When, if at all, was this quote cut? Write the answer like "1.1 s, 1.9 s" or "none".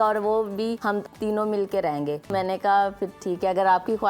1.0 s, 2.3 s